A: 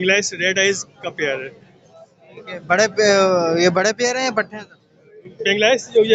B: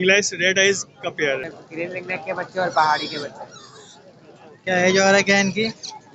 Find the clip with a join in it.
B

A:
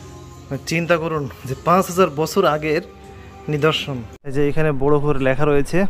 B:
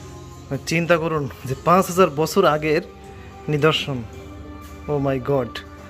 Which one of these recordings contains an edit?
A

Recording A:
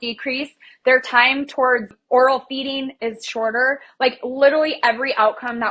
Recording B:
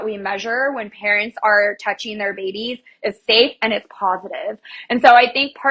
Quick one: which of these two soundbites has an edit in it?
A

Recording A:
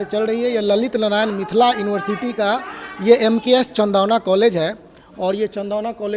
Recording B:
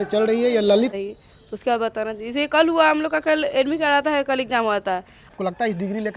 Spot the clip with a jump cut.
B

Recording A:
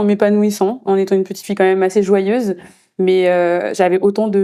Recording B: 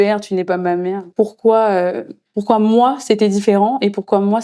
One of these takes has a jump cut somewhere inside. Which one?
B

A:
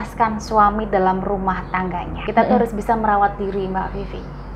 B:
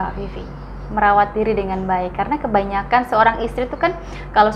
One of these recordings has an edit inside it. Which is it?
A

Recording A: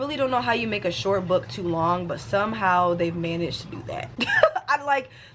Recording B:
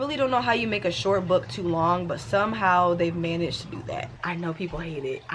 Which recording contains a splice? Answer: B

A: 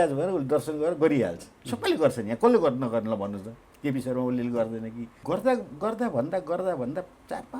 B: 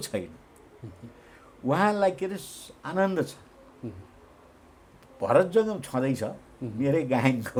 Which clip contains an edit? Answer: A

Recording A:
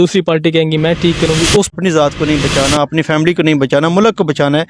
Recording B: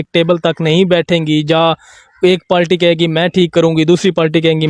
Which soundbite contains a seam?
A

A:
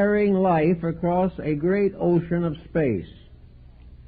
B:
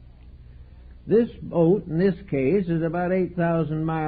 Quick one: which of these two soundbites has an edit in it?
A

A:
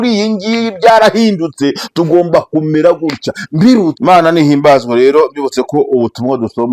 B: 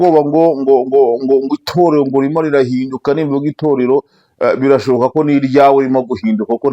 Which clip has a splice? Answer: A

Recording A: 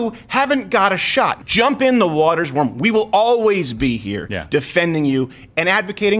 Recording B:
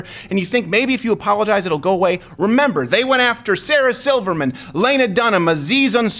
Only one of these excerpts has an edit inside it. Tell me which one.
A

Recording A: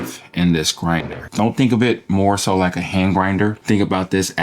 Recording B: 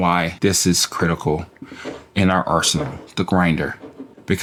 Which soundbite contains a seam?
A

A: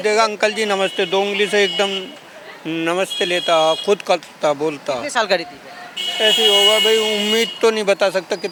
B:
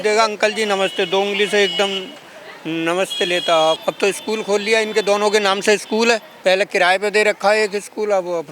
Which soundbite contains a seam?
B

